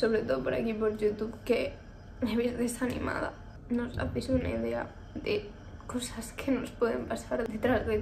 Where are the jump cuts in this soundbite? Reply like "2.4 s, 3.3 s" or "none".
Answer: none